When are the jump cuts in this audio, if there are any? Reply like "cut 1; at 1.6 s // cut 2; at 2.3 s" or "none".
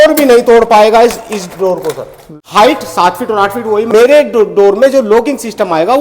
cut 1; at 2.3 s // cut 2; at 3.9 s